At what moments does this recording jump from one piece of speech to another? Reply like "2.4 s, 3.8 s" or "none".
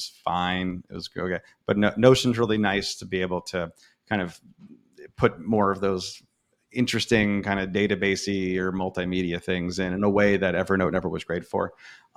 none